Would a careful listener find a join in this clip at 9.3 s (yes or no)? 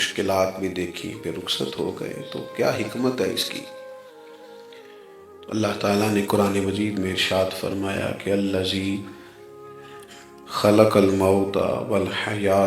no